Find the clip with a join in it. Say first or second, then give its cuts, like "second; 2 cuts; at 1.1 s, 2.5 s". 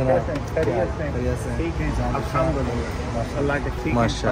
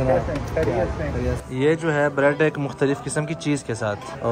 second; 1 cut; at 1.4 s